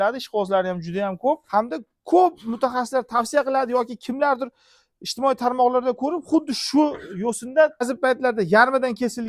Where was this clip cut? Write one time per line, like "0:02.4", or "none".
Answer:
0:01.4
0:07.9

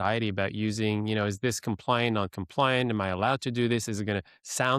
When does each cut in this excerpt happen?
none

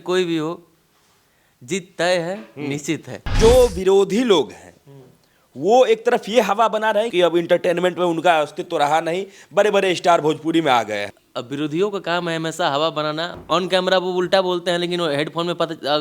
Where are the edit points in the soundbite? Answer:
0:03.4
0:07.1
0:11.2
0:13.4

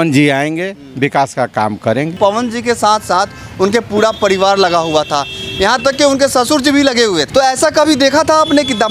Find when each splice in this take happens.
0:02.1
0:07.3

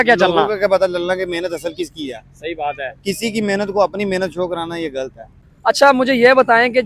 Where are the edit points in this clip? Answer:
0:05.5

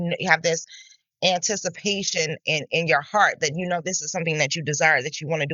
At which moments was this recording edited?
none

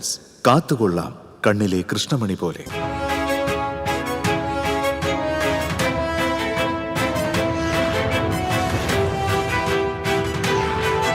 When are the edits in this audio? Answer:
0:02.6

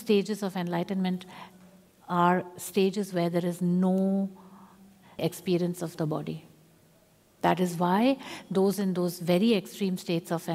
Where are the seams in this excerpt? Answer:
none

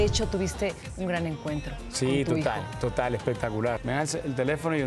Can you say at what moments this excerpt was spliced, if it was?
0:03.8

